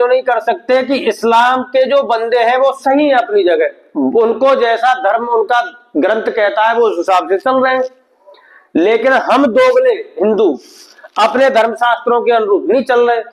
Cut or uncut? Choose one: uncut